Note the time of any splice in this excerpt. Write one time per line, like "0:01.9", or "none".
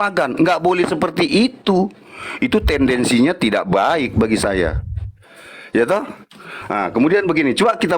none